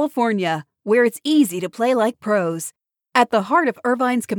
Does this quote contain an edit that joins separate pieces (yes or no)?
no